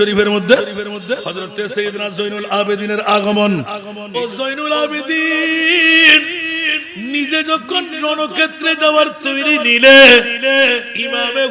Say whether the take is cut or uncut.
cut